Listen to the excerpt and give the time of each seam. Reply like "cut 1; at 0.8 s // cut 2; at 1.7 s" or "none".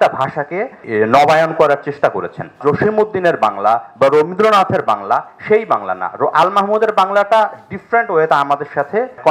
cut 1; at 2.6 s